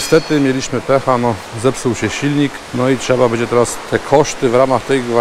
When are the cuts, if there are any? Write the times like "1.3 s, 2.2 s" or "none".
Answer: 2.6 s, 3.8 s